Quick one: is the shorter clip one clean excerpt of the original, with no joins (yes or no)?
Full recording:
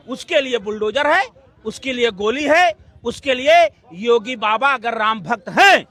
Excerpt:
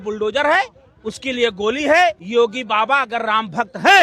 no